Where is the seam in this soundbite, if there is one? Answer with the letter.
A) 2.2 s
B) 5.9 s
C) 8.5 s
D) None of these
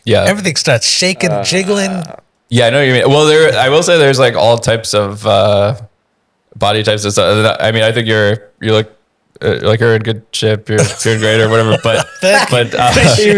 D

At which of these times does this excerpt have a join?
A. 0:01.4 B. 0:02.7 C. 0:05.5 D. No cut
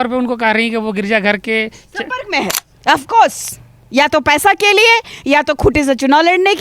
B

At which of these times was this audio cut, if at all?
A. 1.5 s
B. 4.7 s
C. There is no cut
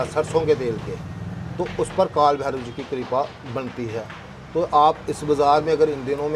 C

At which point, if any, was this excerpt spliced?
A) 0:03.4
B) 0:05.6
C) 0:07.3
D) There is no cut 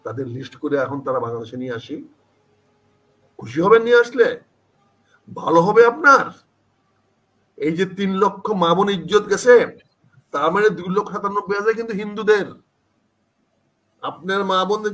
D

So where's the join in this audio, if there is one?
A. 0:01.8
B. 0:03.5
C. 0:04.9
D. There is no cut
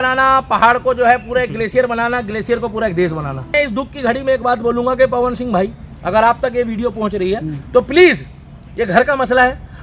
B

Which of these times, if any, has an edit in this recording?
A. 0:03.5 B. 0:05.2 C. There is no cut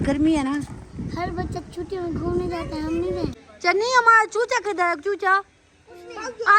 A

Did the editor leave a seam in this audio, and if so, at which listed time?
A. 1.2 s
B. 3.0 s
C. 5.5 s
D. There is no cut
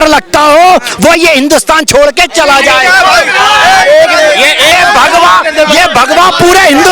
B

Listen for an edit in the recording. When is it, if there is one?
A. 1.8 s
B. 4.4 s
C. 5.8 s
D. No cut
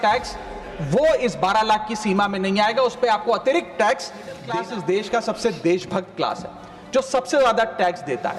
B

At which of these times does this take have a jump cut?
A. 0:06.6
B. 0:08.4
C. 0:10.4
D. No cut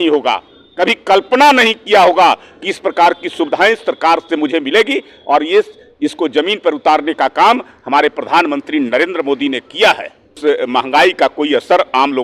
C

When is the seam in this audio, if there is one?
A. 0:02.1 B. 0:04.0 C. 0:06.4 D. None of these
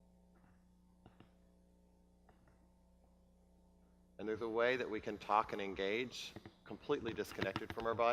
A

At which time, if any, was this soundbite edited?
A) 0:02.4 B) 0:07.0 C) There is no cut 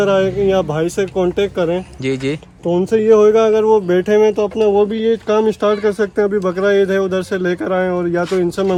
C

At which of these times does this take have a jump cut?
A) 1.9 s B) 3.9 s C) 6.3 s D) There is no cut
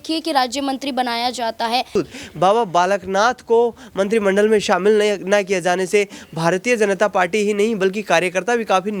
A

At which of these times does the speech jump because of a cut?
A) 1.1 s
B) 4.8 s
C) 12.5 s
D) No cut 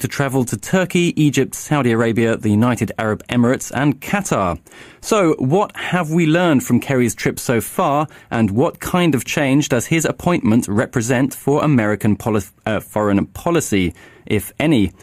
A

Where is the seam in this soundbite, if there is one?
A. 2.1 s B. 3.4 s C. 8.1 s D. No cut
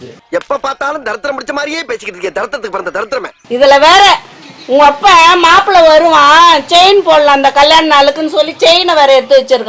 B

